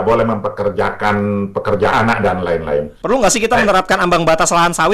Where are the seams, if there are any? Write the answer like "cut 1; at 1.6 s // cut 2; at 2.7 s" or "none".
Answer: cut 1; at 2.9 s